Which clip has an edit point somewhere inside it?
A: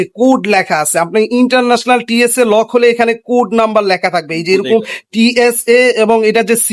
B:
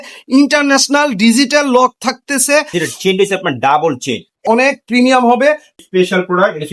B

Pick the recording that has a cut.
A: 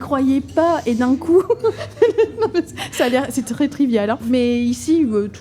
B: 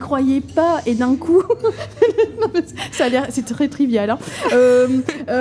A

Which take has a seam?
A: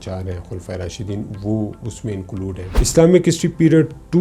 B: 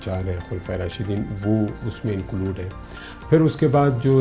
A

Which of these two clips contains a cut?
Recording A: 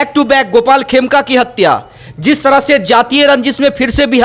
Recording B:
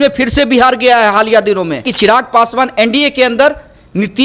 B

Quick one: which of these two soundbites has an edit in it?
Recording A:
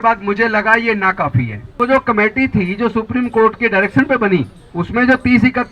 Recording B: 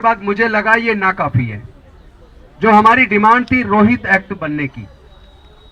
A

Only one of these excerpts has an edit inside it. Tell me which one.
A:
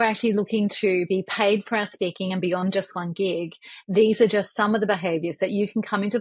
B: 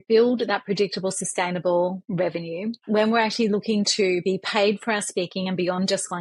B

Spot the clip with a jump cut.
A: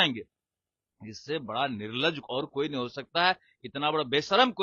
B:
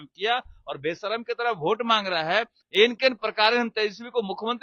B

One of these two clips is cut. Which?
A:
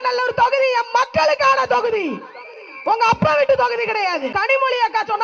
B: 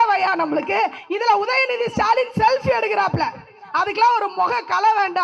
A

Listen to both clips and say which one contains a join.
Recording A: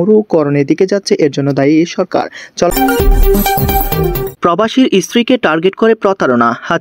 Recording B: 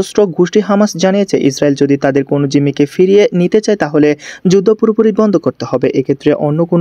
A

